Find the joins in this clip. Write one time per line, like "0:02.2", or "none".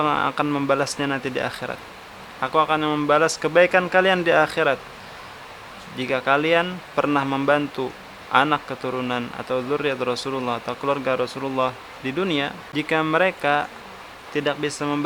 0:12.6